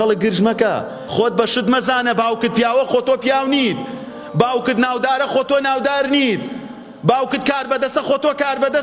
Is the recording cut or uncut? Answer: cut